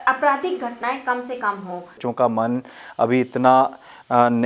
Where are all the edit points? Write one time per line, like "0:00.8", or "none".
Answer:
0:02.0